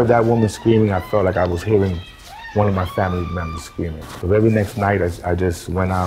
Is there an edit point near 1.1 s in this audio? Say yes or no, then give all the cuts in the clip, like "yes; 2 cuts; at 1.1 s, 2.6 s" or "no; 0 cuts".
no; 1 cut; at 4.1 s